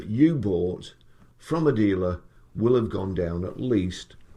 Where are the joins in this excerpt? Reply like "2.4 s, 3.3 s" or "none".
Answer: none